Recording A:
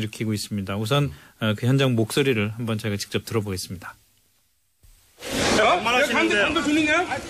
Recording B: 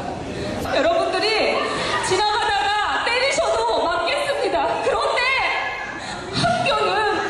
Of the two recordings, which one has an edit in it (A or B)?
B